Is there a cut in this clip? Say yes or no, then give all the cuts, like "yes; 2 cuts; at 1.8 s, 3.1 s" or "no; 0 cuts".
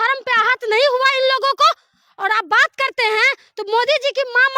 no; 0 cuts